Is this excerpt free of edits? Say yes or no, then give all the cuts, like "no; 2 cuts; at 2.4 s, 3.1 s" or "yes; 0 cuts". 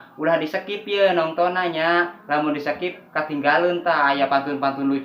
yes; 0 cuts